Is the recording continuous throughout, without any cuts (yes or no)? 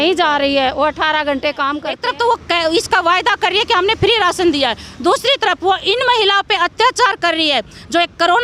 no